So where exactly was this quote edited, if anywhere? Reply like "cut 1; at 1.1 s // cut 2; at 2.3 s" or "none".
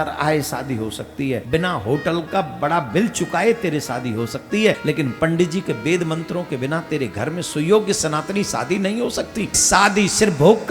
cut 1; at 1.4 s // cut 2; at 4.8 s // cut 3; at 9.6 s